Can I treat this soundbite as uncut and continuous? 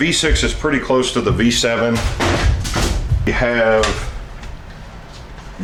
yes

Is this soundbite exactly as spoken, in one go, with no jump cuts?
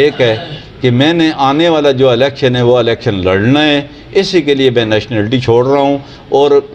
yes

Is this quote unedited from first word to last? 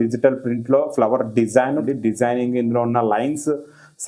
no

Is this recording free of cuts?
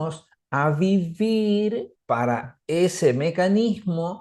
no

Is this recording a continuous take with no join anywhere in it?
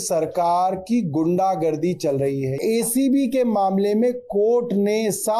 no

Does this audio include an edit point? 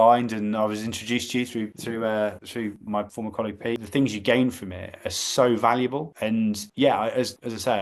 yes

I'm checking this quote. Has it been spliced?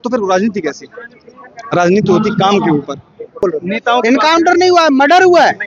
yes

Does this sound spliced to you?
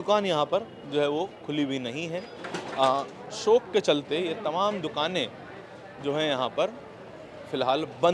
no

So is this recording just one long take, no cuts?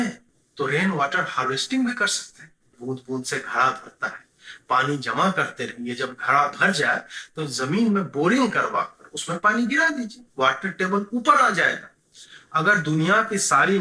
no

